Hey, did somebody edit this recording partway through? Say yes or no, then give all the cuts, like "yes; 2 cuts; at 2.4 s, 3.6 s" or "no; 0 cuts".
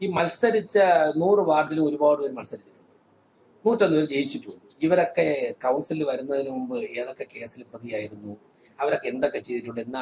no; 0 cuts